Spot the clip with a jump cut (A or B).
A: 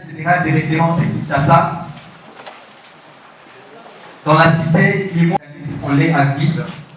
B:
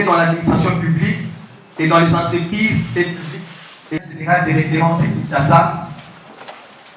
A